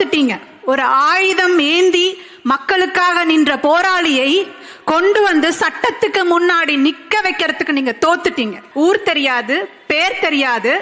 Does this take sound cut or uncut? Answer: cut